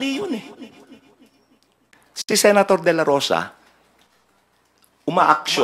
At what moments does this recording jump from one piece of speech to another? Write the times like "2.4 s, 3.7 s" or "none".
2.1 s